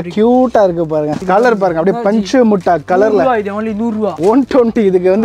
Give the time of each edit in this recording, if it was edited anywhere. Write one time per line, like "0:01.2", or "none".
0:01.2
0:04.1